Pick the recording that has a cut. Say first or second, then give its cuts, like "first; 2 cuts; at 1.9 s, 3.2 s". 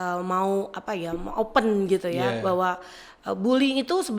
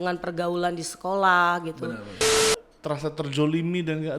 second; 1 cut; at 2.4 s